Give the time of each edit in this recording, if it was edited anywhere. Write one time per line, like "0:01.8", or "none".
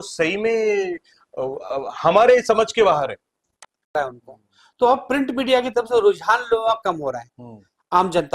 0:03.9